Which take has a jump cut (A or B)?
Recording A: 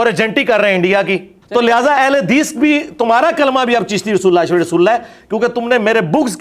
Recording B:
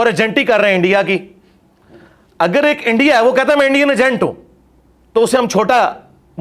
A